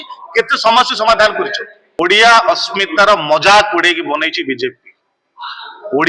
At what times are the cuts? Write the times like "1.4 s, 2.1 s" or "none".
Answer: 2.0 s

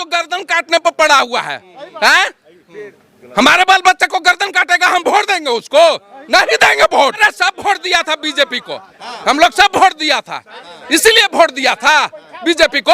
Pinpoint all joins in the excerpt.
7.2 s

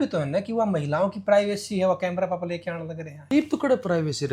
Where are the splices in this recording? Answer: 3.3 s

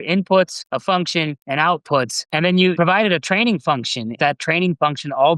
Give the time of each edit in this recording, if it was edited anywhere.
1.0 s, 2.7 s, 4.1 s

